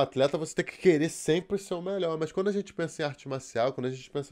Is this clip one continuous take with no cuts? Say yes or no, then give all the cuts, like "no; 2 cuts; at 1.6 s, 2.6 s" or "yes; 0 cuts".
yes; 0 cuts